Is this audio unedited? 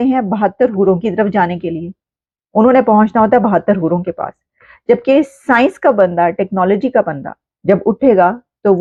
yes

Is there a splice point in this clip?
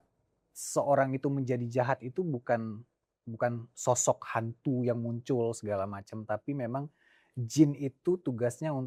no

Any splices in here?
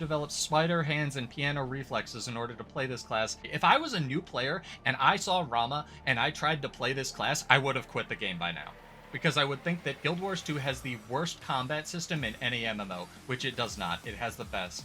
yes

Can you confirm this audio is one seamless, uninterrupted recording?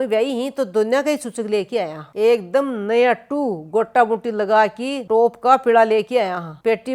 no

